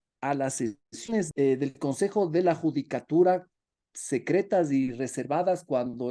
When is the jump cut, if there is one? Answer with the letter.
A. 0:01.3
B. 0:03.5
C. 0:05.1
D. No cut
A